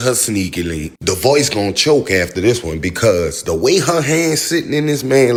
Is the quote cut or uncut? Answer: uncut